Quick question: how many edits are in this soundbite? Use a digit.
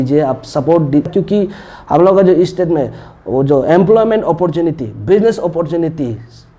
1